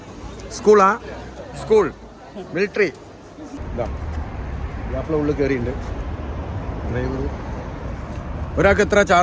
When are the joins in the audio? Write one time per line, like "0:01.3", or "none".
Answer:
0:03.6